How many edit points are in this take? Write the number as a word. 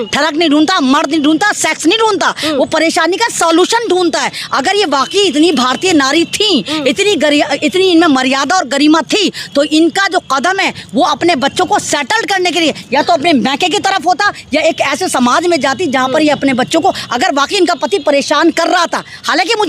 zero